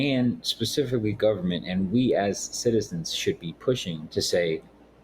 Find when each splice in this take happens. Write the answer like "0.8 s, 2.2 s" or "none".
4.0 s